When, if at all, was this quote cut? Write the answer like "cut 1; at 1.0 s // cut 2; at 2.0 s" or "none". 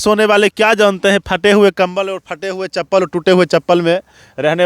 none